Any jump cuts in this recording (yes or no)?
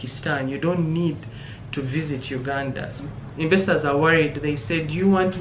yes